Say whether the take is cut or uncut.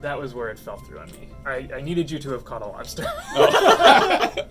uncut